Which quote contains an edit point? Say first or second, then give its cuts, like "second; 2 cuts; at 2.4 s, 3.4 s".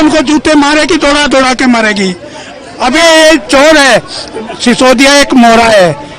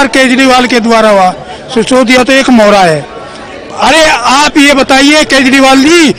first; 1 cut; at 3.0 s